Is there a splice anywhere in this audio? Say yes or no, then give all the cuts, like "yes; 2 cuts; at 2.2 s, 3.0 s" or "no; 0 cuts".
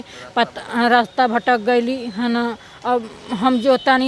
no; 0 cuts